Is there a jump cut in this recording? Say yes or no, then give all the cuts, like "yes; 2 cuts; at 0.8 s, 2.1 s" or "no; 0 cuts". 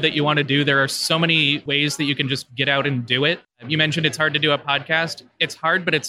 yes; 1 cut; at 1.6 s